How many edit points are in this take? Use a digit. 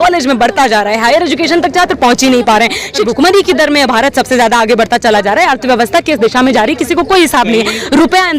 1